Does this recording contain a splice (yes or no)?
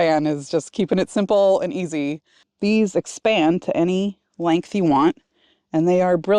yes